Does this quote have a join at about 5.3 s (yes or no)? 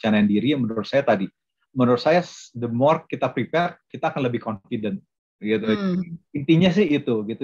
no